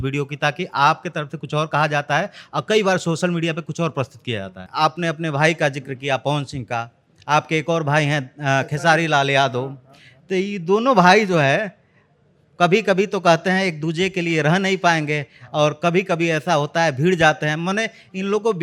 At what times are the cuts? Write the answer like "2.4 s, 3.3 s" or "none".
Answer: 4.6 s